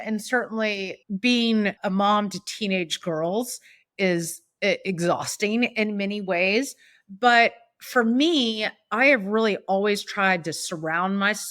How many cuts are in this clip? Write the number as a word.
two